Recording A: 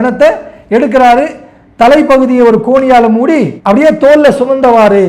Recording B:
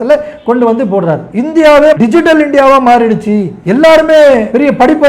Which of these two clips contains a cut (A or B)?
B